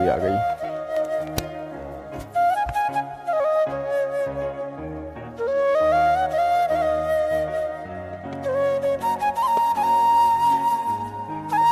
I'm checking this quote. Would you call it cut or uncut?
uncut